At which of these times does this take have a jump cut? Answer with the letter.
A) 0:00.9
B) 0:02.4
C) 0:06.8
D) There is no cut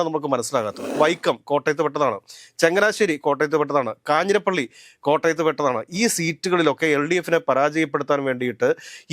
A